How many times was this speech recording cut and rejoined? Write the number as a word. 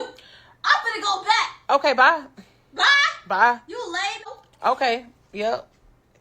one